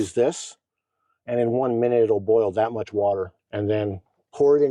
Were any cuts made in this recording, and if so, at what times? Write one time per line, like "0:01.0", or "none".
0:03.3